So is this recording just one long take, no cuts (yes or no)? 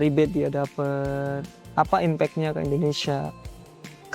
no